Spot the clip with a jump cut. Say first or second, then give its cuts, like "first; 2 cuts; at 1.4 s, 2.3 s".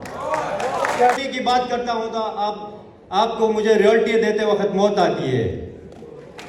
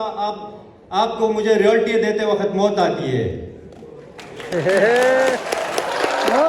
first; 1 cut; at 1.2 s